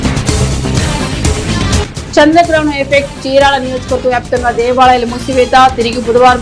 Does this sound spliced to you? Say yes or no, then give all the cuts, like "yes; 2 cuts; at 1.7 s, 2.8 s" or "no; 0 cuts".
yes; 1 cut; at 0.9 s